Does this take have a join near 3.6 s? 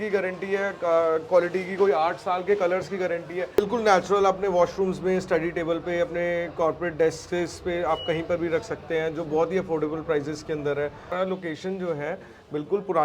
yes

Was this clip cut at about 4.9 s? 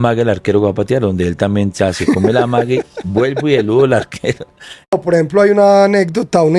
yes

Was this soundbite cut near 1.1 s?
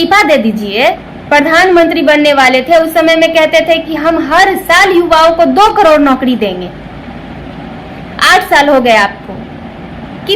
yes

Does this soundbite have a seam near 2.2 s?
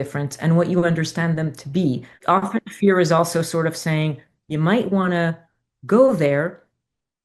yes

